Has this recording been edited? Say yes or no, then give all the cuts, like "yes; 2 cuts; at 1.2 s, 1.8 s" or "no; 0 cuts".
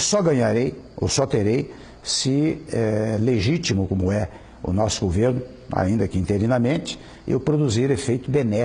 no; 0 cuts